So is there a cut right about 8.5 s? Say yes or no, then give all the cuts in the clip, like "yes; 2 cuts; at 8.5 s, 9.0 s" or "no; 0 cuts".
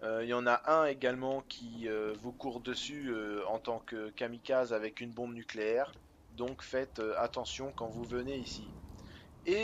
yes; 1 cut; at 8.5 s